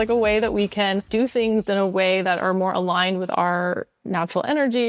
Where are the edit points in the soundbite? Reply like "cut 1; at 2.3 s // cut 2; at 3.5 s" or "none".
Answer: cut 1; at 1.1 s